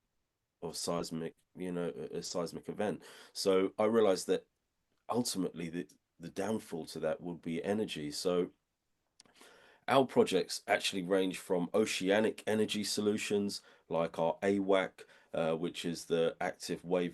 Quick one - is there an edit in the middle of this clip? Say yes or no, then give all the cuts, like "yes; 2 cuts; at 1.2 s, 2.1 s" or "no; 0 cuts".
no; 0 cuts